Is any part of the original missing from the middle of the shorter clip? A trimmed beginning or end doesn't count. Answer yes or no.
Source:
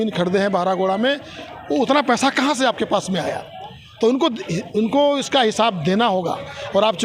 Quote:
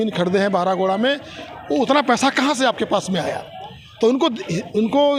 no